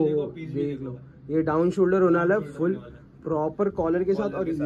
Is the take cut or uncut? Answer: uncut